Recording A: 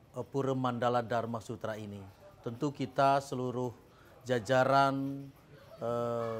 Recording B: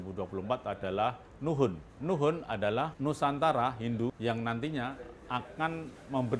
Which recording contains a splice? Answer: B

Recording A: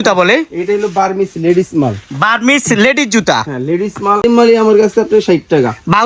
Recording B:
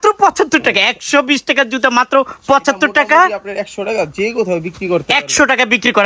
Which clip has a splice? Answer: A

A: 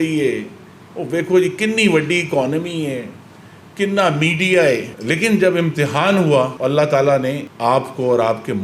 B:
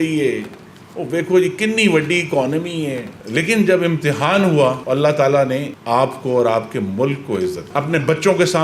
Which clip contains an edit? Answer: B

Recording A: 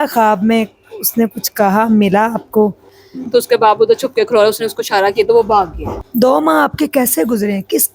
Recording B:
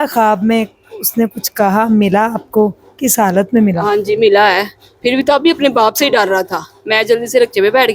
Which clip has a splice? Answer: A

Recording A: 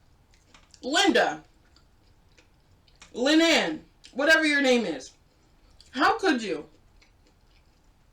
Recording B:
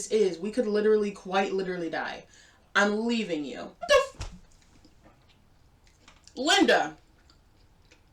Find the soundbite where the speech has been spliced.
B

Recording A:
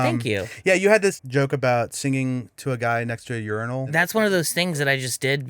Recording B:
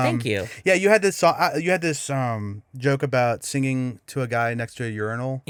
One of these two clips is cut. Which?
A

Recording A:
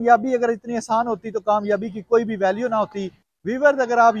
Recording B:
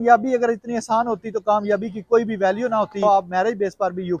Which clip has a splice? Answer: B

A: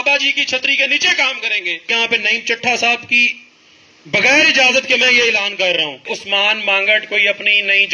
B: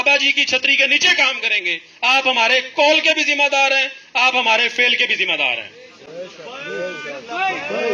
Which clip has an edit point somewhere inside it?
A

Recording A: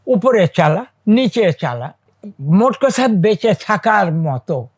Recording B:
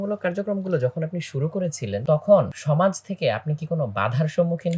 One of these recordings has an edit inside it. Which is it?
B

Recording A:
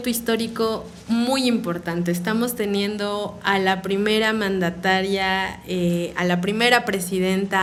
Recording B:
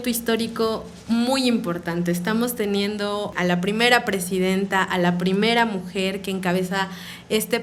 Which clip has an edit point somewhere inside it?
B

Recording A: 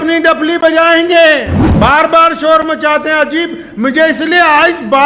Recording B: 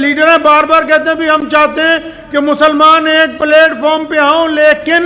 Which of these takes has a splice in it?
A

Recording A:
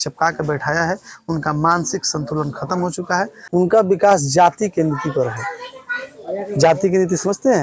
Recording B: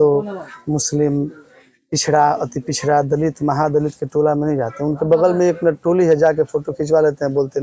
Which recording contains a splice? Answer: A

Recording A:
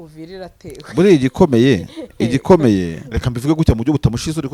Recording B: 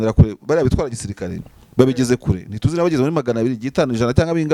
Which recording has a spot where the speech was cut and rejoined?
A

